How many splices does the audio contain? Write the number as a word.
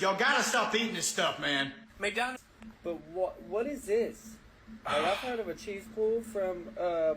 one